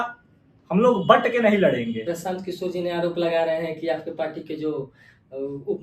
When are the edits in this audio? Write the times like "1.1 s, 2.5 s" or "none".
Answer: 2.0 s